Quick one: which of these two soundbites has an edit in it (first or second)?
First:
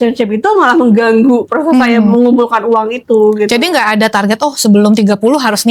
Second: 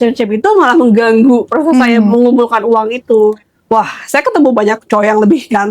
second